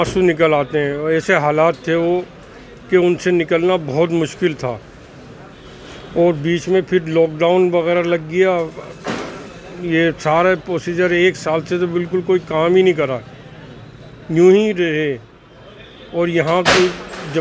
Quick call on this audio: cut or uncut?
uncut